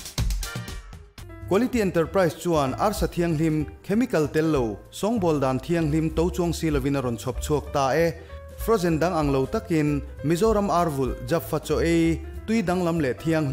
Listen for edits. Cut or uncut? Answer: cut